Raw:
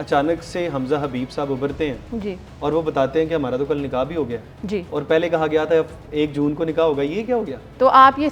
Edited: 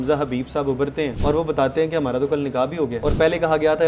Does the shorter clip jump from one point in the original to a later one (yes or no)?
yes